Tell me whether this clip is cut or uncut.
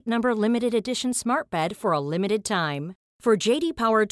uncut